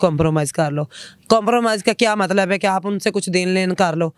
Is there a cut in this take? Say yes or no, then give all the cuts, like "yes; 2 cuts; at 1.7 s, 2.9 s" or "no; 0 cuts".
no; 0 cuts